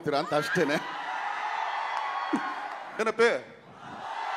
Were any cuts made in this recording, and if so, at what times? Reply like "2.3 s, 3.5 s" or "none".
2.9 s